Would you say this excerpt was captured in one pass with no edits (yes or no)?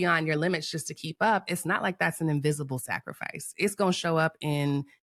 yes